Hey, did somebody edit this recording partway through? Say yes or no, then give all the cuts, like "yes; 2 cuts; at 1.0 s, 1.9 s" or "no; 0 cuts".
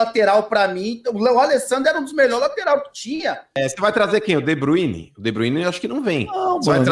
yes; 1 cut; at 3.6 s